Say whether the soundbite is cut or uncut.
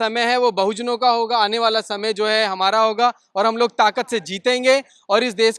uncut